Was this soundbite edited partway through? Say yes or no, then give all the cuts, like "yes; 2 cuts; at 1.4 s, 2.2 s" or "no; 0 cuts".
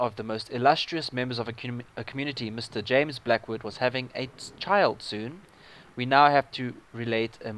no; 0 cuts